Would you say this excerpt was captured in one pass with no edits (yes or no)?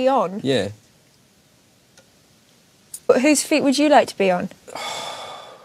no